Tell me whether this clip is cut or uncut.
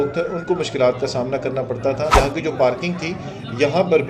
cut